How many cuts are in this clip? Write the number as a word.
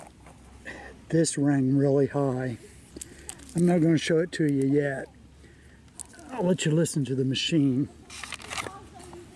zero